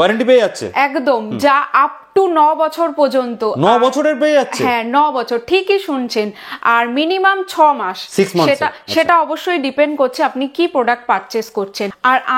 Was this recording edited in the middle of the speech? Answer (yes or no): no